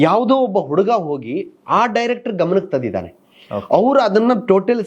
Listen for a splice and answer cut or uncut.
uncut